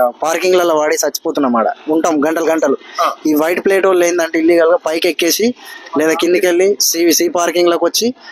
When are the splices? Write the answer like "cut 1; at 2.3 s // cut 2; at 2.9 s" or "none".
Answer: none